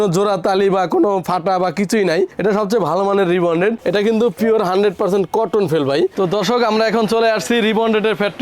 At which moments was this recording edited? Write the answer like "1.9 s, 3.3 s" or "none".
3.8 s, 6.1 s